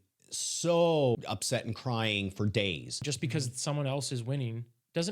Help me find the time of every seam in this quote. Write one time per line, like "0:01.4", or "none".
0:01.2
0:03.1